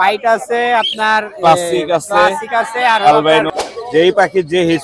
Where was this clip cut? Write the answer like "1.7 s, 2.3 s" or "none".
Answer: 3.5 s